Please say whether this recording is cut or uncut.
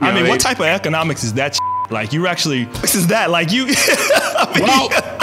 cut